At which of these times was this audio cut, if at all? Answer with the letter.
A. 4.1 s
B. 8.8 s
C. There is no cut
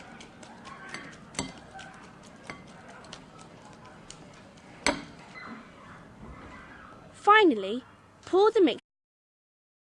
C